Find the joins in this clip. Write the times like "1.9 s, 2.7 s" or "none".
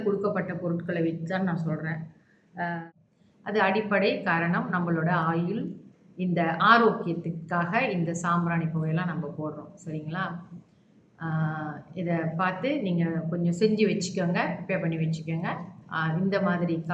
2.9 s